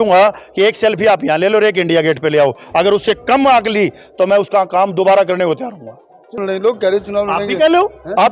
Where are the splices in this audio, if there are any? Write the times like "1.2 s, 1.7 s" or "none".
6.4 s